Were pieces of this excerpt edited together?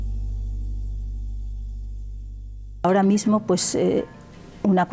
yes; 1 cut; at 2.8 s

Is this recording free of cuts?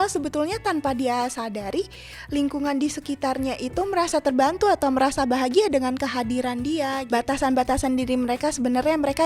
no; 1 cut; at 7.0 s

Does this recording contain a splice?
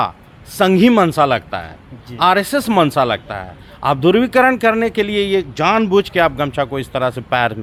no; 0 cuts

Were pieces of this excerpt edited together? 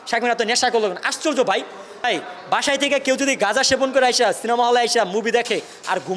yes; 1 cut; at 2.0 s

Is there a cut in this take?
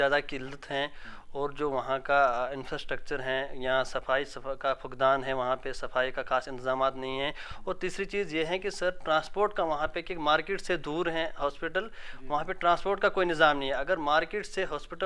no; 0 cuts

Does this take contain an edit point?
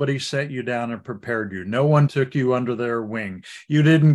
yes; 1 cut; at 2.1 s

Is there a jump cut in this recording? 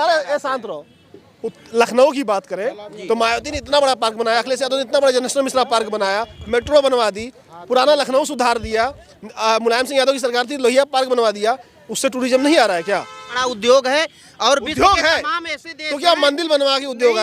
yes; 1 cut; at 13.4 s

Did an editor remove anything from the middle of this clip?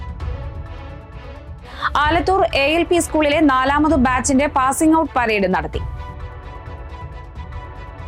no; 0 cuts

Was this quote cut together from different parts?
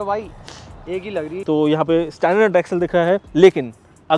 yes; 1 cut; at 1.4 s

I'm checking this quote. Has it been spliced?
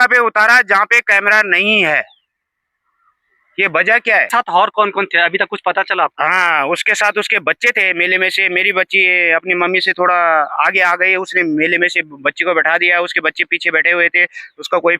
yes; 1 cut; at 4.3 s

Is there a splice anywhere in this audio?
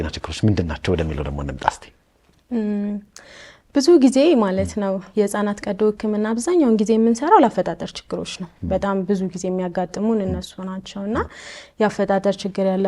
no; 0 cuts

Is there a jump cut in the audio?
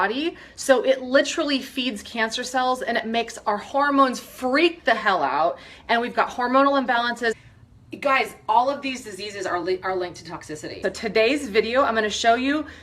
yes; 2 cuts; at 7.4 s, 10.8 s

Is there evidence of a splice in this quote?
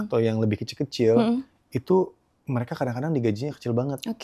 no; 0 cuts

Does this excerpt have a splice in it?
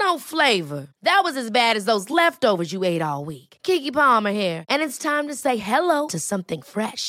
no; 0 cuts

